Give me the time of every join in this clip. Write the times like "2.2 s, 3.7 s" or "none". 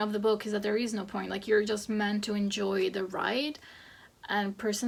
none